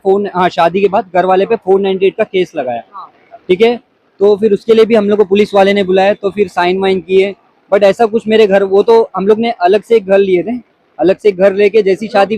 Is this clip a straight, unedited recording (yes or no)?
yes